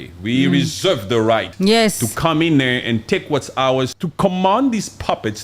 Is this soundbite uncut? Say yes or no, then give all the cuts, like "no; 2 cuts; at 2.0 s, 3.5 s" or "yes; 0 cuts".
no; 2 cuts; at 1.5 s, 4.0 s